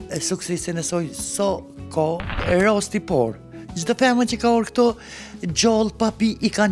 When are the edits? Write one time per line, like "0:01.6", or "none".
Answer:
0:02.4